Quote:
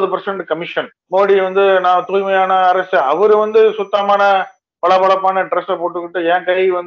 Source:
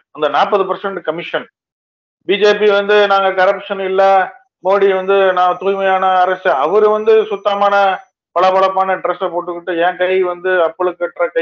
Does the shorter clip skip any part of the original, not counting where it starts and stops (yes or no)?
yes